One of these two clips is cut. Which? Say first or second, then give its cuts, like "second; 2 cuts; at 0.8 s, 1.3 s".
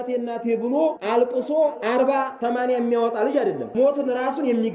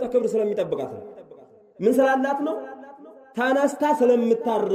first; 3 cuts; at 1.0 s, 2.1 s, 3.6 s